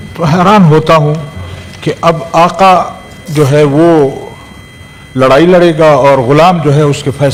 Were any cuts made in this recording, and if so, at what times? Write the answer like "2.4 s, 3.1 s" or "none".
none